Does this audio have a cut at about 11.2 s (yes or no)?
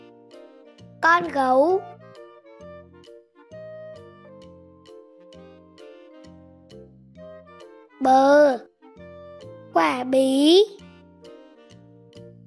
yes